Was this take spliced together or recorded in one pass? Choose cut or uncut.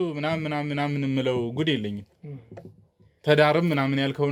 uncut